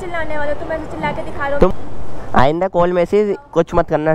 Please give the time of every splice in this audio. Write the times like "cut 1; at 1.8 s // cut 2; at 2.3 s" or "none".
cut 1; at 1.7 s